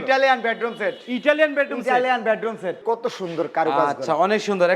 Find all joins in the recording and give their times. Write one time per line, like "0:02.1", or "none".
0:02.8